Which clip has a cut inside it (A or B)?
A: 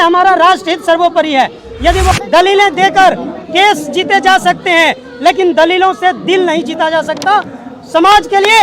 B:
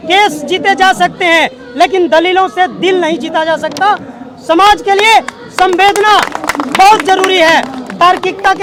A